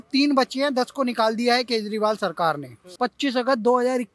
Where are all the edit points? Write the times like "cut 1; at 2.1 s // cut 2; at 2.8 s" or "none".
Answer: cut 1; at 2.8 s